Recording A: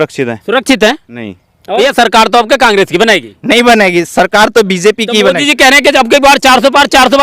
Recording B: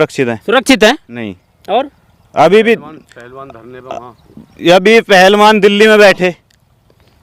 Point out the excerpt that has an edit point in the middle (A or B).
A